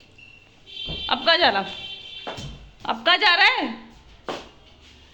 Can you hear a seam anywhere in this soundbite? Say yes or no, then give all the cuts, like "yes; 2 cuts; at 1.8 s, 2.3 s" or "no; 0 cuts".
no; 0 cuts